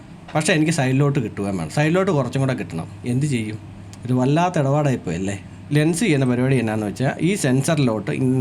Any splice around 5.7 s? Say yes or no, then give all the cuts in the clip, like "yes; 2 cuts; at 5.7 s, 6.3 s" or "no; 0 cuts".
yes; 1 cut; at 5.7 s